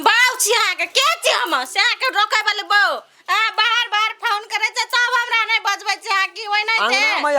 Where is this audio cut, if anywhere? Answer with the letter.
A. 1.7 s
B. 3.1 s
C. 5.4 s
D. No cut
B